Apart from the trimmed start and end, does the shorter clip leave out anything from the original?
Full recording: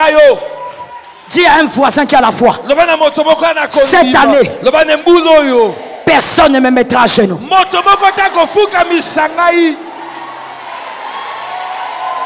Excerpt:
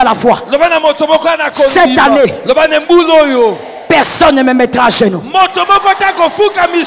no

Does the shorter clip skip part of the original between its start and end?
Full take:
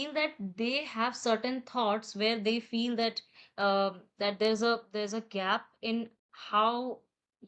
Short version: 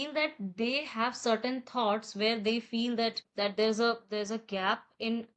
yes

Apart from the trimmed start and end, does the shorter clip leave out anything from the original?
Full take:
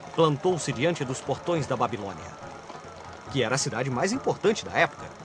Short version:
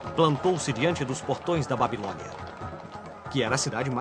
no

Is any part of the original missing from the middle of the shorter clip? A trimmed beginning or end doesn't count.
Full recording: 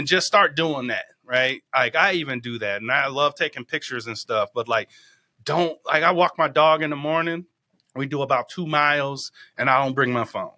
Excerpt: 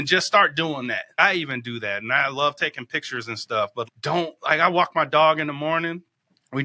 yes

